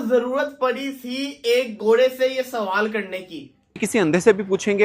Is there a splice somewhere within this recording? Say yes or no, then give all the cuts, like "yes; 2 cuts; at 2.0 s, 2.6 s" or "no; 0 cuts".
yes; 1 cut; at 3.8 s